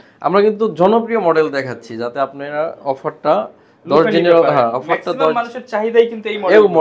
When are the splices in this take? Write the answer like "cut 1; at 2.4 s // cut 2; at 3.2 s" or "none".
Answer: none